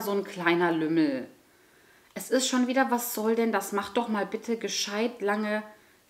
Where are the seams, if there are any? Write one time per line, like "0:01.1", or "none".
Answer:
none